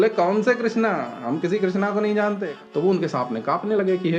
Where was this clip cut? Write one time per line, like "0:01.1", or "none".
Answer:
0:02.5